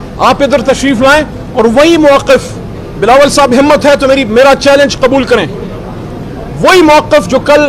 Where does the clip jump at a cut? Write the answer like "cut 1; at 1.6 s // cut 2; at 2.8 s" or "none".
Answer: none

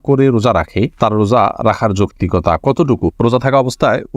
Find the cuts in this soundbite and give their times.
cut 1; at 3.2 s

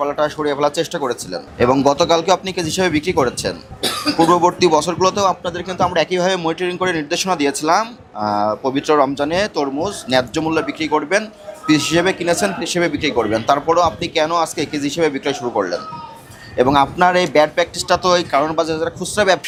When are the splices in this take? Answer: none

